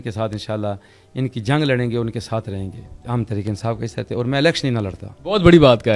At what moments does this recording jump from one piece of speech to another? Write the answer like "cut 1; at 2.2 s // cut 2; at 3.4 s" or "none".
cut 1; at 2.9 s // cut 2; at 5.1 s